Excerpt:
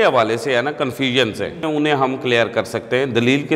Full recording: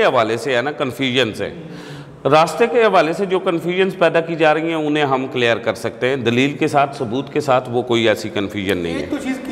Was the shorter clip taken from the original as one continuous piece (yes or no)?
no